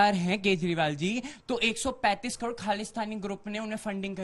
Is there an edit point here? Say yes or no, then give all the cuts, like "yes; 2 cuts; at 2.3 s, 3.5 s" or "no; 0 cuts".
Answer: no; 0 cuts